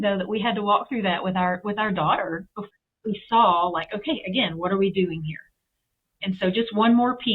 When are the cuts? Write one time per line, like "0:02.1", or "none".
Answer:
0:02.7
0:06.1